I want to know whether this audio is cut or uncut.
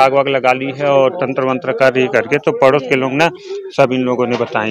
uncut